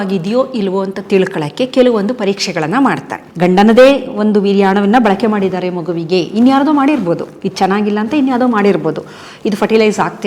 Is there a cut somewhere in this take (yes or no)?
yes